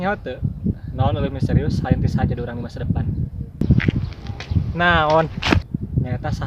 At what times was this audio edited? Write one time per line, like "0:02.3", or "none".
none